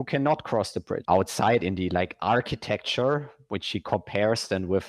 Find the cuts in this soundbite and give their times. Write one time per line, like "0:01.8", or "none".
0:00.9